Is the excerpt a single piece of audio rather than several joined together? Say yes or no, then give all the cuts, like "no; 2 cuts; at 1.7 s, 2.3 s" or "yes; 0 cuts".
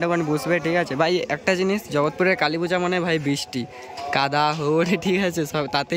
yes; 0 cuts